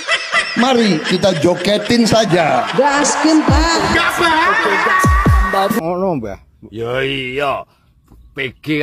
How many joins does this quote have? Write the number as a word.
one